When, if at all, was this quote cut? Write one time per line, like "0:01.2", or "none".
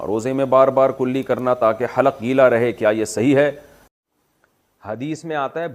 0:03.9